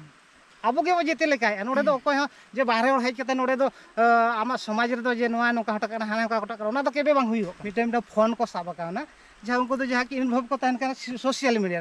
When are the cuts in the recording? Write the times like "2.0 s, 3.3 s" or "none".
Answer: 7.6 s